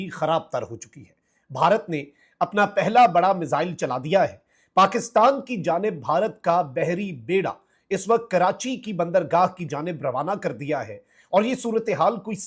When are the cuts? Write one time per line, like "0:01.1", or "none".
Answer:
none

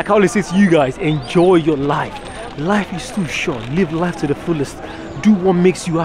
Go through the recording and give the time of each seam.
none

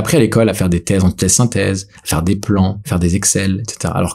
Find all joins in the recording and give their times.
0:02.8

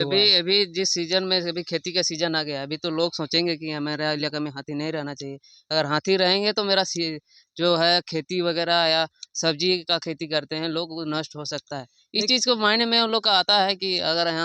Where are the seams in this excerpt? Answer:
0:03.8

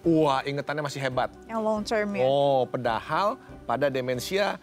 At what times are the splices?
none

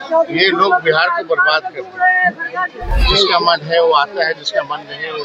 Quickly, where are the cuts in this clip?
0:02.9

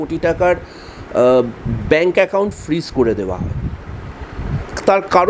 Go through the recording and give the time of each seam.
none

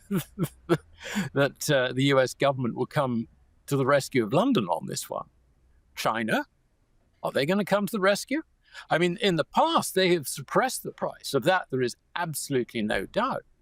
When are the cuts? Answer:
none

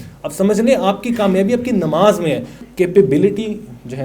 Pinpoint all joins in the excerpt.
0:02.5

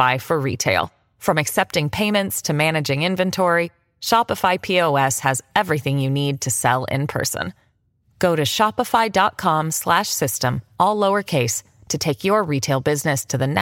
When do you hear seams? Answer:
none

